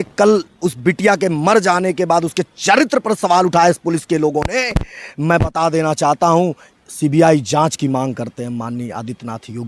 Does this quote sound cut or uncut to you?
uncut